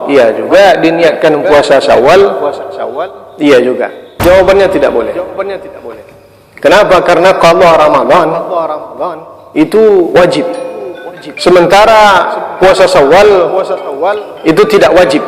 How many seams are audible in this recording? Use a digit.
1